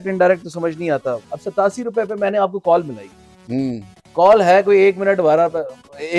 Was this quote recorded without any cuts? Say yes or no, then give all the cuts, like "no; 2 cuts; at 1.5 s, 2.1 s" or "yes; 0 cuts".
no; 1 cut; at 1.2 s